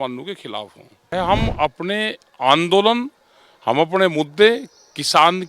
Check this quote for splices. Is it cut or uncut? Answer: cut